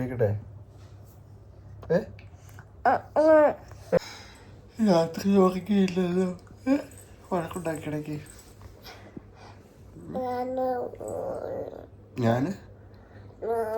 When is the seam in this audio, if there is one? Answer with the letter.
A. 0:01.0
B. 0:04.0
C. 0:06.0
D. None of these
B